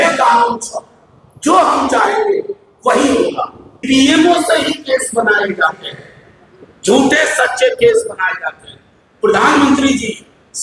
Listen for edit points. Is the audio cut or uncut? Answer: cut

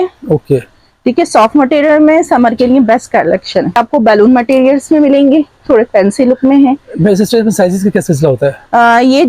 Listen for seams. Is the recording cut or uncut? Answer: cut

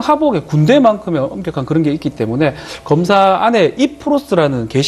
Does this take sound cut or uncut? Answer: cut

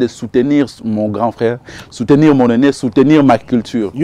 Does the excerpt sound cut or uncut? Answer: uncut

